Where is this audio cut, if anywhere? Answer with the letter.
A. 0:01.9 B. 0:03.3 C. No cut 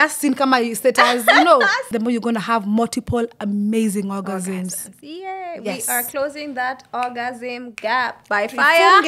A